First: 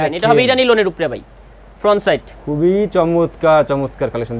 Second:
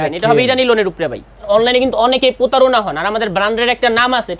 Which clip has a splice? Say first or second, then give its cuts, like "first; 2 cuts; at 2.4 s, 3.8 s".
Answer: second; 1 cut; at 1.5 s